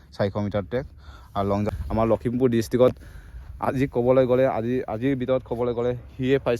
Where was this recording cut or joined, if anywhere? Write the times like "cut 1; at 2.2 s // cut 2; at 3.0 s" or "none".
cut 1; at 1.7 s